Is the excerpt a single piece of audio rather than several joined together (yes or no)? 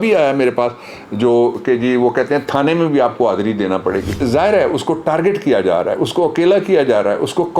no